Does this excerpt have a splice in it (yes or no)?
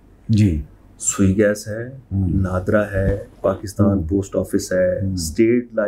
no